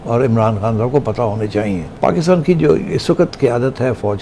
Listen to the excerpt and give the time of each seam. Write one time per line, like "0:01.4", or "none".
0:01.9